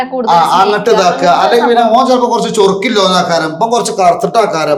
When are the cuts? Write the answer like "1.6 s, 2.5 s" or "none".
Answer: none